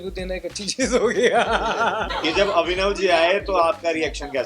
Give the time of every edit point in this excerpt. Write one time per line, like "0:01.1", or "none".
0:02.0